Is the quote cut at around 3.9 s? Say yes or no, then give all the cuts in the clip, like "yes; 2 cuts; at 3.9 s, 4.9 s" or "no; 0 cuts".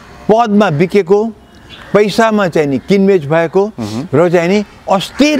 no; 0 cuts